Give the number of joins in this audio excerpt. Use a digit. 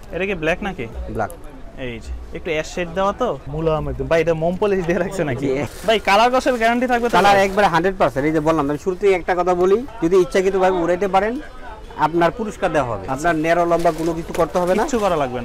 4